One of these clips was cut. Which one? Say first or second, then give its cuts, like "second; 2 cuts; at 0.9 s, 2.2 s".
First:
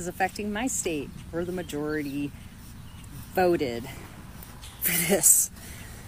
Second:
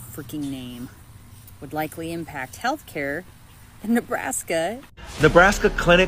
second; 1 cut; at 4.9 s